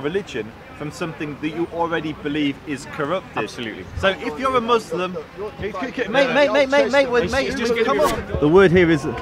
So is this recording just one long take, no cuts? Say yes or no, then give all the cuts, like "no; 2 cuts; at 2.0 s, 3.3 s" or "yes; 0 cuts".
no; 1 cut; at 8.2 s